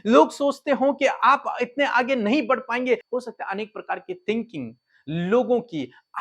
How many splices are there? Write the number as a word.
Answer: one